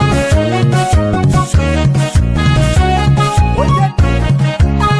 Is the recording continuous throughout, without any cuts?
yes; 0 cuts

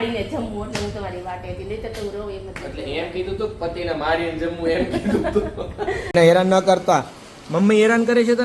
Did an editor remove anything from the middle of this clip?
yes; 1 cut; at 6.0 s

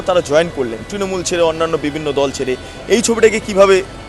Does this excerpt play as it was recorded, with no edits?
yes; 0 cuts

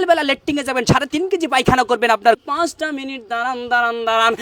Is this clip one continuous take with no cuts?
no; 1 cut; at 2.4 s

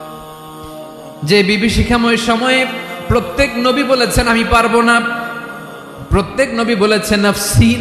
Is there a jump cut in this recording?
no; 0 cuts

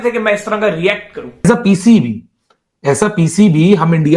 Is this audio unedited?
no; 1 cut; at 1.4 s

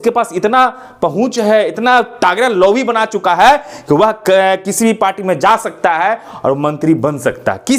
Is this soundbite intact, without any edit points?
yes; 0 cuts

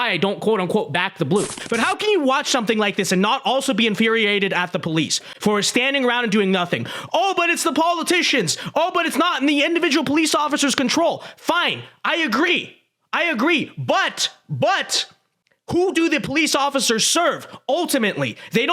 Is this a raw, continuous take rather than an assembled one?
no; 1 cut; at 1.6 s

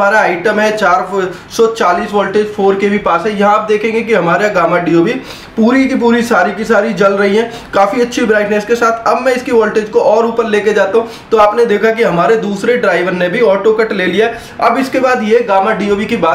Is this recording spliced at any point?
no; 0 cuts

